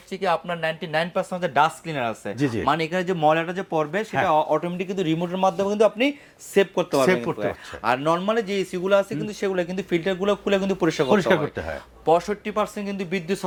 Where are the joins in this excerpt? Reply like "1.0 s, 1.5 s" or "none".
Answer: none